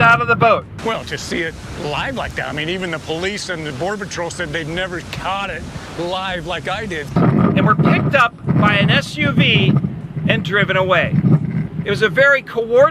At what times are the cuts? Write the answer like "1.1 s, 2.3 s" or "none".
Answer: none